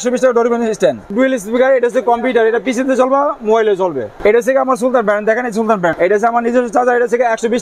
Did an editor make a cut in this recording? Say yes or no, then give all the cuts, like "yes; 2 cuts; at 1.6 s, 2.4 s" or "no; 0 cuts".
yes; 3 cuts; at 1.1 s, 4.1 s, 5.9 s